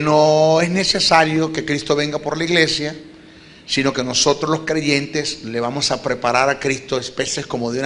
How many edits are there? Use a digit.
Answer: 1